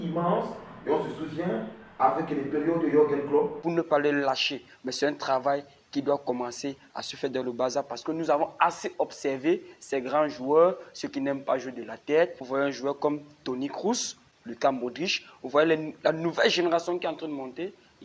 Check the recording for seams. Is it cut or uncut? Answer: cut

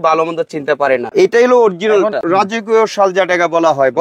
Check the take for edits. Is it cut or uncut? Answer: cut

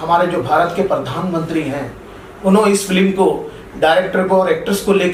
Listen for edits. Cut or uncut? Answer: uncut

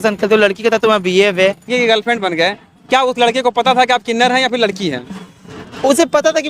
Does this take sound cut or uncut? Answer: cut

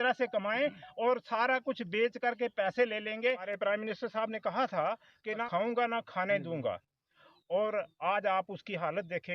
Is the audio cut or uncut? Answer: cut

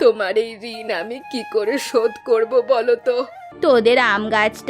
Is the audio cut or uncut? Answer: cut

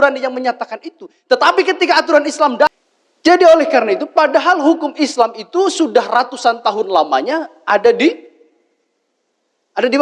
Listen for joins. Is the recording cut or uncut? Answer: cut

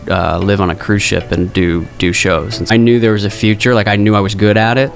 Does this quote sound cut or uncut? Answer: cut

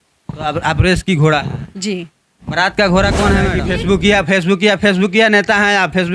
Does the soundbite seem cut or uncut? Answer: cut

